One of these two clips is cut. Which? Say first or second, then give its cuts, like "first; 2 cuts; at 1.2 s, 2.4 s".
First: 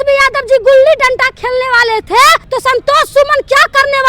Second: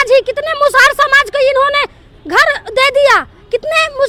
first; 1 cut; at 2.4 s